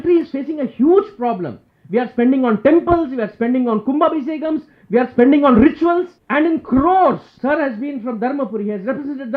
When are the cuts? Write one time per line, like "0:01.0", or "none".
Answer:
0:06.2
0:07.3